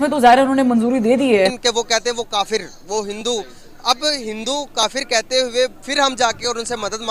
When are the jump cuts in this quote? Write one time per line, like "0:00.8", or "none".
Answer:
0:01.5